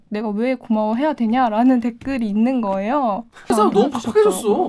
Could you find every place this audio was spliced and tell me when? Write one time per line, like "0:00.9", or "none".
0:03.5